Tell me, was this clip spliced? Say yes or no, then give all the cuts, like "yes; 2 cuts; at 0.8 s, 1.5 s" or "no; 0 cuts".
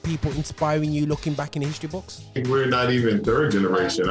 yes; 1 cut; at 2.4 s